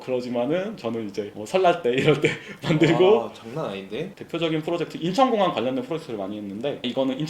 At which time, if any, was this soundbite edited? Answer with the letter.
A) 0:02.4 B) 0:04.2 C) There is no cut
B